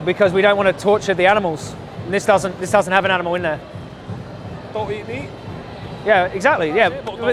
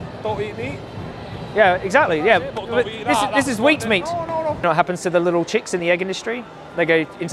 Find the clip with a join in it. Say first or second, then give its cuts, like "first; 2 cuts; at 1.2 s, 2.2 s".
second; 1 cut; at 4.6 s